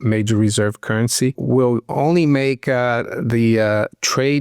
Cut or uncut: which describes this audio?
cut